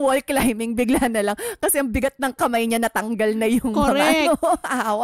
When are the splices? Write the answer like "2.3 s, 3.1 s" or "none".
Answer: none